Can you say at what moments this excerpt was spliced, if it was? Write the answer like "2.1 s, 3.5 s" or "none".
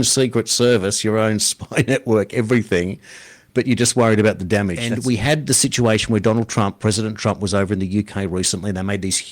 4.9 s

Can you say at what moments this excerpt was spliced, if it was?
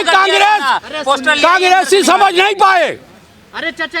none

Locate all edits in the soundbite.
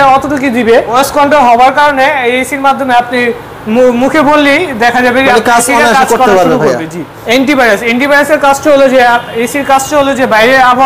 0.9 s, 7.1 s

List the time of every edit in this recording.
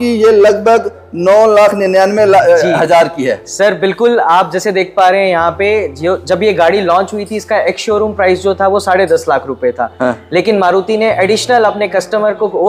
none

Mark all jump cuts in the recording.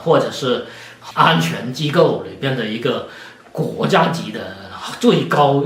0.9 s

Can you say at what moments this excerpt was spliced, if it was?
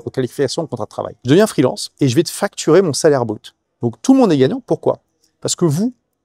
1.2 s, 1.8 s

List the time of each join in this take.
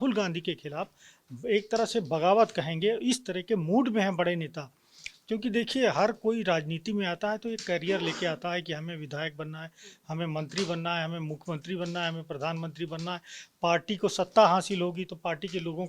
none

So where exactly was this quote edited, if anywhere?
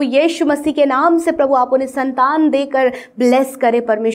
none

